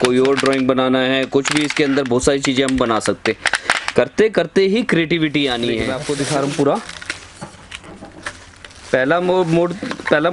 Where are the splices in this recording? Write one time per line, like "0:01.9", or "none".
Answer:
0:05.9